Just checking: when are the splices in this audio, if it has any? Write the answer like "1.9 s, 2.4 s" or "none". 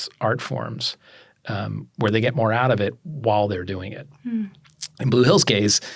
none

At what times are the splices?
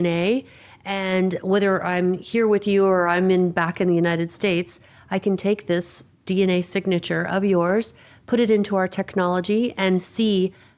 none

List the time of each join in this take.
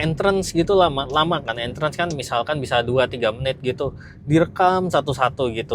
none

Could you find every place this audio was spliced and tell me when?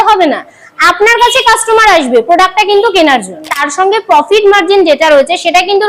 3.6 s

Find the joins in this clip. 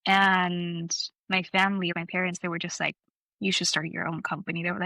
1.9 s

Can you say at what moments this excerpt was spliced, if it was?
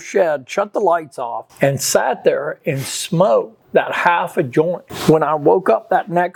none

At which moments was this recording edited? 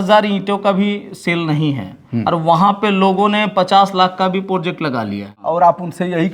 4.9 s

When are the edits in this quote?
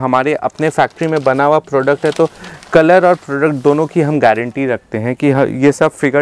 none

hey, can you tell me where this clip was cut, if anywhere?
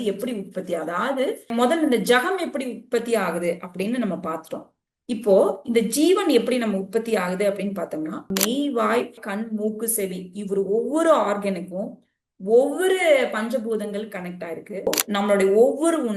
1.5 s, 8.2 s, 14.9 s

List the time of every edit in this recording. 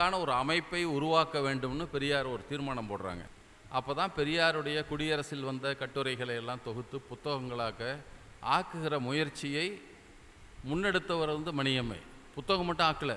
3.3 s

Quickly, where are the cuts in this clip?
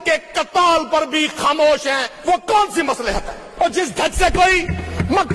2.1 s, 3.4 s

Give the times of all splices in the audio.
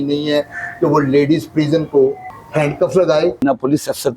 2.3 s, 3.4 s

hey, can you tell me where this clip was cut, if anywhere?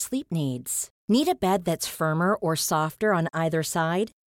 none

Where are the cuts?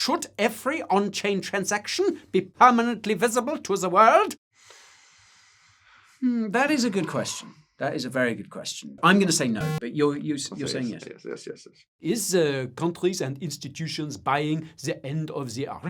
4.4 s, 8.9 s, 11.8 s

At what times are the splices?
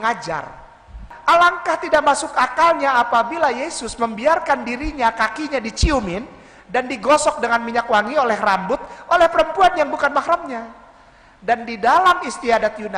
1.1 s

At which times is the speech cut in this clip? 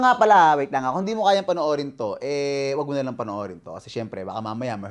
none

